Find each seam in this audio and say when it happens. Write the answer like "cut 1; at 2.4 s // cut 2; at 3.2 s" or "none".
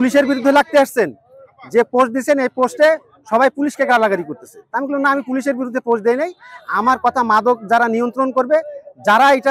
none